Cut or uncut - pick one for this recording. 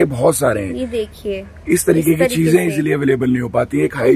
uncut